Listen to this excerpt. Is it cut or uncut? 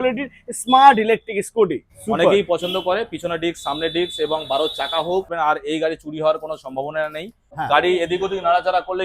cut